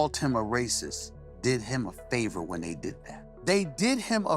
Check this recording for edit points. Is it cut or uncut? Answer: uncut